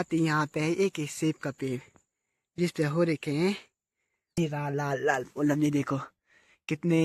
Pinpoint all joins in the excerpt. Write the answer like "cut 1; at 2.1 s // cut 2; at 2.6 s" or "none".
cut 1; at 4.4 s